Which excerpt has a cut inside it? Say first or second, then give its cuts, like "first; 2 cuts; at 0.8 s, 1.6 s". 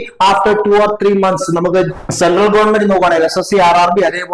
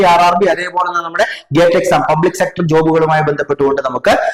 first; 1 cut; at 2.0 s